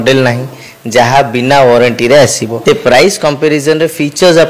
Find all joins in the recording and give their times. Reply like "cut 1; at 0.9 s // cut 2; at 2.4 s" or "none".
cut 1; at 2.5 s